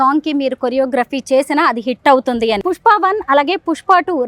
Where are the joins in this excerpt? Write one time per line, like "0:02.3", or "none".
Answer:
0:02.6